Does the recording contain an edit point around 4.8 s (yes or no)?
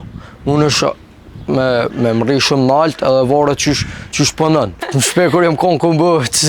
yes